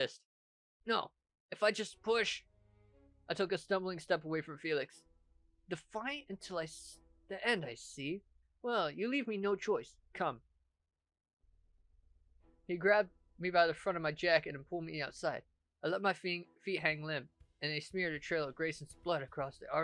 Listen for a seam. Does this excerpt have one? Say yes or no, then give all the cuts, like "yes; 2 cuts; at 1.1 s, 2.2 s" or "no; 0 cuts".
no; 0 cuts